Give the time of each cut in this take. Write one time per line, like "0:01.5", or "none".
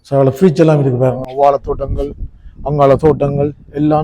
0:01.3

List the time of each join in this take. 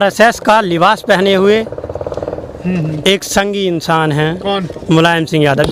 none

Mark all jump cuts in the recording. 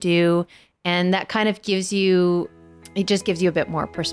0:02.6

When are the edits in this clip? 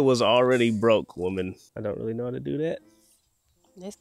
0:01.7

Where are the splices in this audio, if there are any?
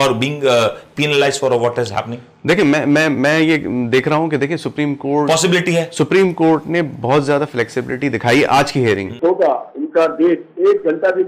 0:09.1

